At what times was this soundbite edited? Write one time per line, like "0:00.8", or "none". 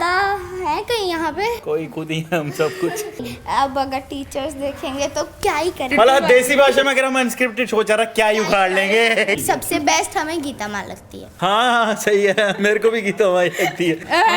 0:03.3
0:05.9
0:09.4